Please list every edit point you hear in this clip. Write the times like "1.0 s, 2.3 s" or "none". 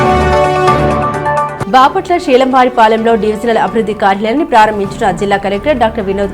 1.4 s